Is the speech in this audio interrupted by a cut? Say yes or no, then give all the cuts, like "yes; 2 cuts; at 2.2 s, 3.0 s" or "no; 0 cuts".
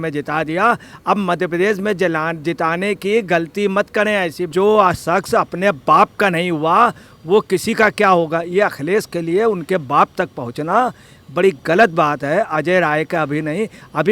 yes; 1 cut; at 4.5 s